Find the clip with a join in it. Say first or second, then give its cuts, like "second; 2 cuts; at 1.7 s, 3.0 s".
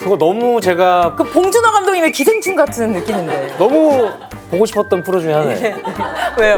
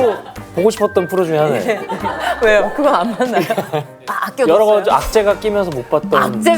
second; 1 cut; at 4.1 s